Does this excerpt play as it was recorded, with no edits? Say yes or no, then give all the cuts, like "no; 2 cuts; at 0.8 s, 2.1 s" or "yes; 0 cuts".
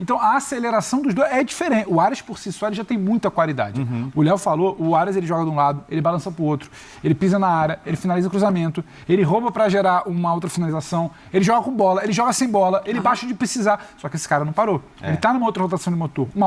yes; 0 cuts